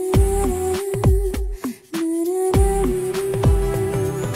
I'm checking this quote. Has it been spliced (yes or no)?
no